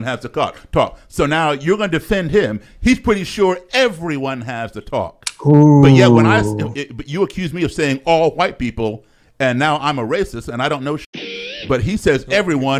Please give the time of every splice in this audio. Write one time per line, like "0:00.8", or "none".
none